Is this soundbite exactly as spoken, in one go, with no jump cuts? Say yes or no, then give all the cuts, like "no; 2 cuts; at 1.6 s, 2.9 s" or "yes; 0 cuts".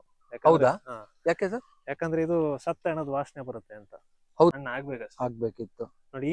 no; 1 cut; at 4.5 s